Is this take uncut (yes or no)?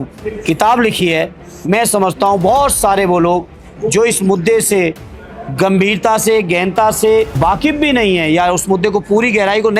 no